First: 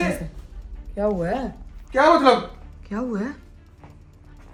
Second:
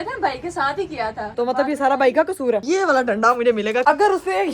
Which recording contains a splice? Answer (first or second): second